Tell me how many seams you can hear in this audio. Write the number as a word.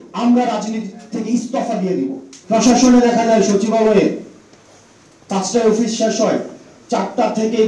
one